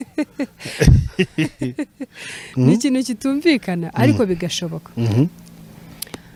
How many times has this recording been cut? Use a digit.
0